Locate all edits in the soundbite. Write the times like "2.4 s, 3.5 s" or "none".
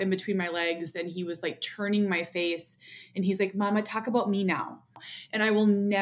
5.0 s

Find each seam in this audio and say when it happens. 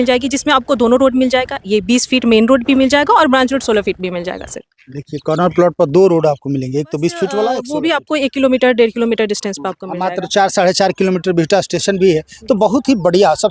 7.7 s

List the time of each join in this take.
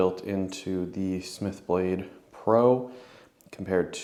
none

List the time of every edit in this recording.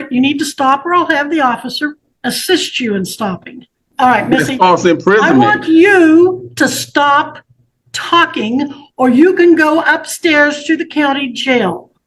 2.1 s, 3.8 s

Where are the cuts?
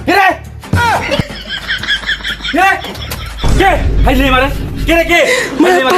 none

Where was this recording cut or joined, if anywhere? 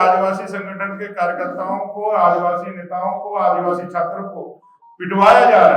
none

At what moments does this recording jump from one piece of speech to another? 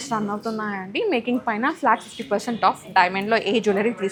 none

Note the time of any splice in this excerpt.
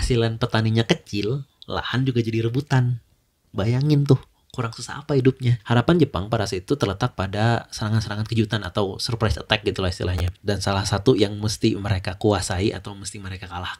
5.6 s

